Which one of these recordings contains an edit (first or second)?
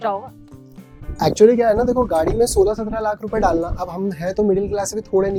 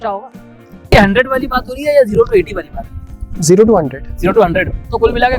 second